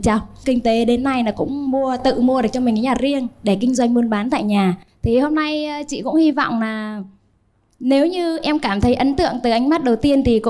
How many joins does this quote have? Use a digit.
0